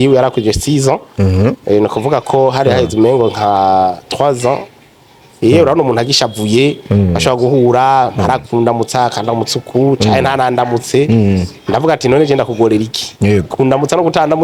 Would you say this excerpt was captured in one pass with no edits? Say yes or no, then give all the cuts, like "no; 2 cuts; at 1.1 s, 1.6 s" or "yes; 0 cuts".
yes; 0 cuts